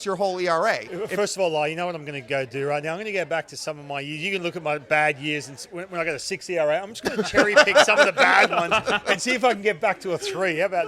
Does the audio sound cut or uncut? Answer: cut